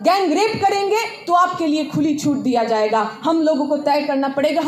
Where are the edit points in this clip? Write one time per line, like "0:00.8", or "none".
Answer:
none